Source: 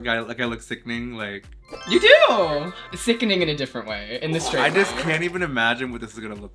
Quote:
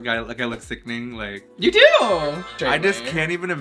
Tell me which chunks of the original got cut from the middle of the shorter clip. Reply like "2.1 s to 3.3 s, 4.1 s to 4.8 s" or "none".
1.4 s to 1.7 s, 2.8 s to 4.5 s

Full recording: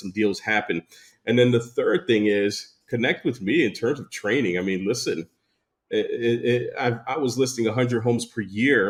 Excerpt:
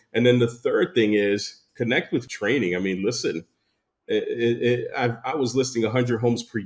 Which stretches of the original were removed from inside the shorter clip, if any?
3.4 s to 4.1 s

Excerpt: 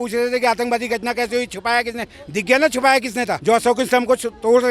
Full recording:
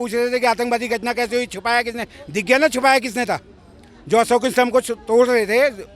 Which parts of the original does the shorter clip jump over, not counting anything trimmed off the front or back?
3.4 s to 4.0 s

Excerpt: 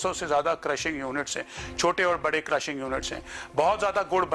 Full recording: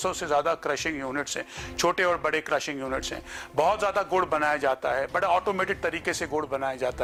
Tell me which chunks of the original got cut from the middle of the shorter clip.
none

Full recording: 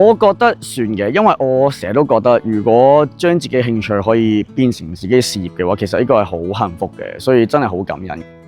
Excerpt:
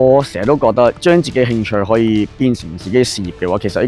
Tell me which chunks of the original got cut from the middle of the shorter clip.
2.4 s to 3.1 s

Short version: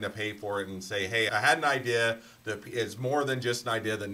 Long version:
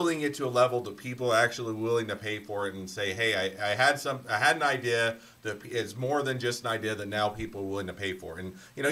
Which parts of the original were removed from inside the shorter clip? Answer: 3.3 s to 4.3 s

